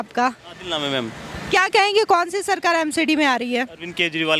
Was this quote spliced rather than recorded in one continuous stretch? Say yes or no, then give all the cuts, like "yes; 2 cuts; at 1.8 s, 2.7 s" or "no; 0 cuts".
no; 0 cuts